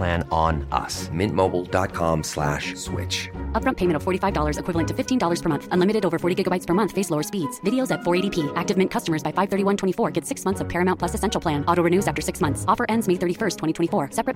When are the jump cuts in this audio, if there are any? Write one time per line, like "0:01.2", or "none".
none